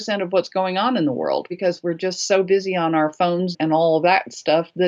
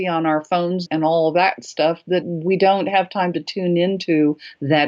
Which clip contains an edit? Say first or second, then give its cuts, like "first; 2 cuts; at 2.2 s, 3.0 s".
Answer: first; 1 cut; at 1.6 s